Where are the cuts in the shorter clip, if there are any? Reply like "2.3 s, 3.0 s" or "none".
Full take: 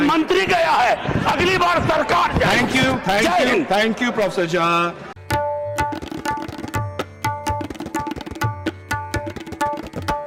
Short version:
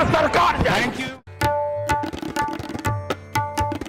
1.0 s